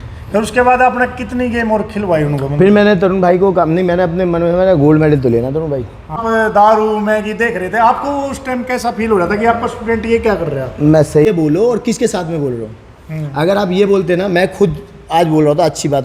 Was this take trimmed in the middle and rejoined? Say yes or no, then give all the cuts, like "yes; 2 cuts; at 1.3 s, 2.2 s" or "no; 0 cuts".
yes; 2 cuts; at 6.2 s, 11.3 s